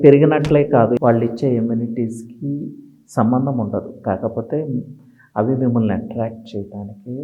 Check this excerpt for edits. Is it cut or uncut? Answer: cut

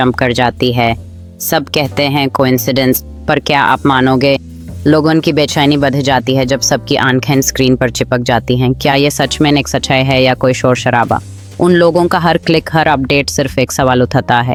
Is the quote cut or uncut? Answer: uncut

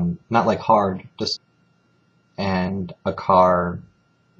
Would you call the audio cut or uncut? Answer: uncut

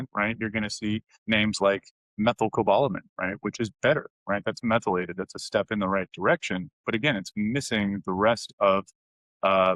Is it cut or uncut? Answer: cut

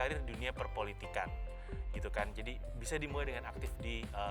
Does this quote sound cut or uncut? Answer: uncut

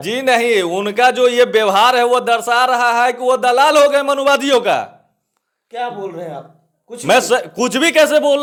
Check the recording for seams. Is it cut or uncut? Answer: uncut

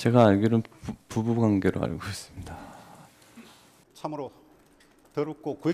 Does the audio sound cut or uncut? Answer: uncut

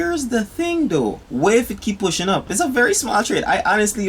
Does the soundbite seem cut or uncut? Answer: uncut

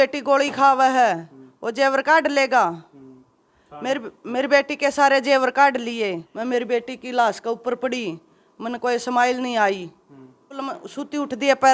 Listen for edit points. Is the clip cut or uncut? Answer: cut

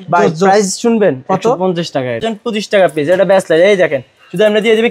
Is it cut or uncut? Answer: cut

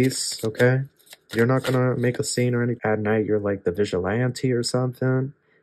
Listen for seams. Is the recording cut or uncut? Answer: cut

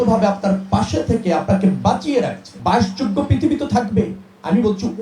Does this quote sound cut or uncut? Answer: cut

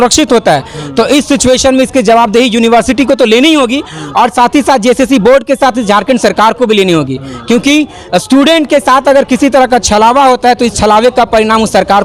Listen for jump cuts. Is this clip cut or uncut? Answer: uncut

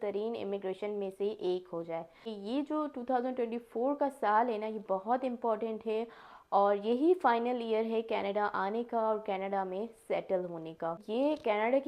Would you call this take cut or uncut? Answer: cut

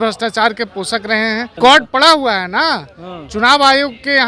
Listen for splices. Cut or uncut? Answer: cut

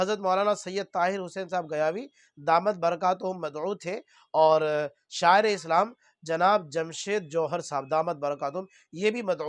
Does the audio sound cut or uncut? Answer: uncut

